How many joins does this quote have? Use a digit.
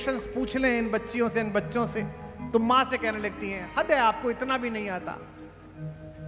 0